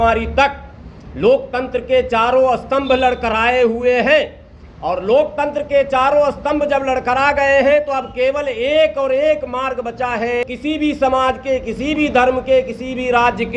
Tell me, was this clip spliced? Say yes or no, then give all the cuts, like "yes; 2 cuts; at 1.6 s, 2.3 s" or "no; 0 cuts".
yes; 1 cut; at 10.4 s